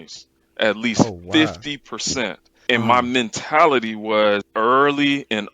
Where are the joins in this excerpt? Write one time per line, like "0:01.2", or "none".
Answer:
0:02.5